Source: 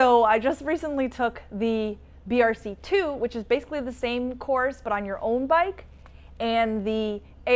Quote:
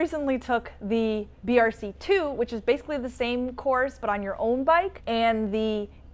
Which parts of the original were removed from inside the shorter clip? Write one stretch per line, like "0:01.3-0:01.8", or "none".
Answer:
0:02.0-0:02.1
0:05.8-0:06.3